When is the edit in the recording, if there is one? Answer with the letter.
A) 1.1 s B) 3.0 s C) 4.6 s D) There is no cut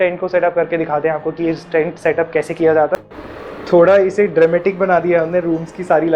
B